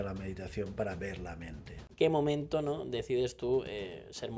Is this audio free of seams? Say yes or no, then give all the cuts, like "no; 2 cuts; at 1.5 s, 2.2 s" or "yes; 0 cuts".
no; 1 cut; at 1.9 s